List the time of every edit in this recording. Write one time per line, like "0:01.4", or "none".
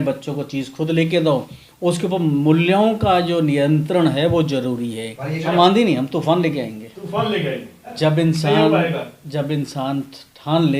0:05.4
0:07.9